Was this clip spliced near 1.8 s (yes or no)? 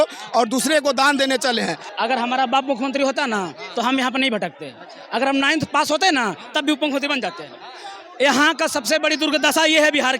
yes